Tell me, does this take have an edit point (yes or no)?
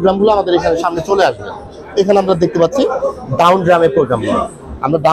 no